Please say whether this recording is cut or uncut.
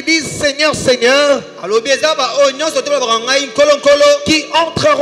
uncut